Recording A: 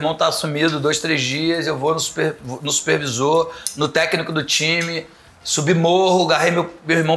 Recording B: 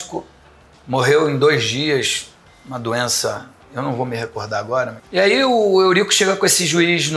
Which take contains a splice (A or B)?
B